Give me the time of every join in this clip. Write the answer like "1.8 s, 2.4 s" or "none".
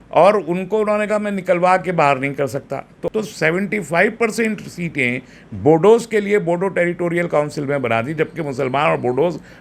3.0 s